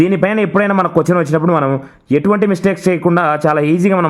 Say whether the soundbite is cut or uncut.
uncut